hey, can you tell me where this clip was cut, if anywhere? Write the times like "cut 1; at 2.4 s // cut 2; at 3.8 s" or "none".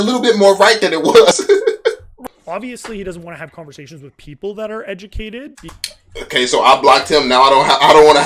cut 1; at 2.1 s